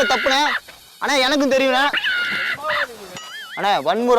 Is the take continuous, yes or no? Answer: no